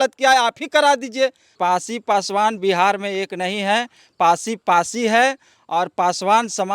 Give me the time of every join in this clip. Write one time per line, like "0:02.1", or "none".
0:01.5